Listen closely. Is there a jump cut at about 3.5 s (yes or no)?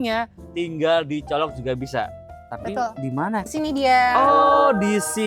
yes